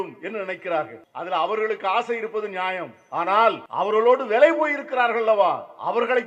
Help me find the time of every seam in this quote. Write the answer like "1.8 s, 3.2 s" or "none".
1.0 s, 3.6 s